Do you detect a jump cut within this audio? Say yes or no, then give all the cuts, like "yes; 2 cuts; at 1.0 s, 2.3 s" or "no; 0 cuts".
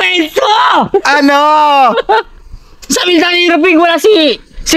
no; 0 cuts